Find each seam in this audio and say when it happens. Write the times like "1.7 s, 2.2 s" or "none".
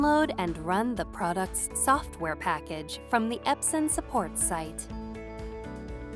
4.7 s